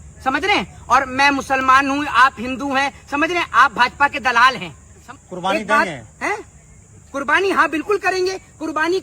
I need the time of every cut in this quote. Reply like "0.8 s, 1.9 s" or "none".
5.1 s